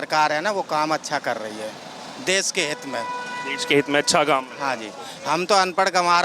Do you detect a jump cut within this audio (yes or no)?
no